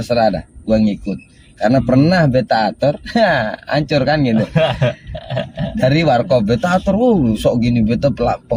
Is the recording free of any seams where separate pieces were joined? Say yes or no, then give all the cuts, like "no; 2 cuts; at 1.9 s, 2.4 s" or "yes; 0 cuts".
yes; 0 cuts